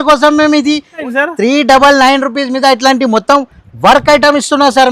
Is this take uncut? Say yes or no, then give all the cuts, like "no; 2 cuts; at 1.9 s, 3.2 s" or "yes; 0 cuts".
no; 1 cut; at 1.0 s